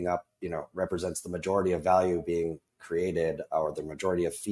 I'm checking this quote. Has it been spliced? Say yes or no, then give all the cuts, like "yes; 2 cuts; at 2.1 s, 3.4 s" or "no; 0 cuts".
no; 0 cuts